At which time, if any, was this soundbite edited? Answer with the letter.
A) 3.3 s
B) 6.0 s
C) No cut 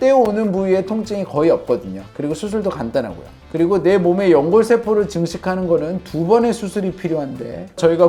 C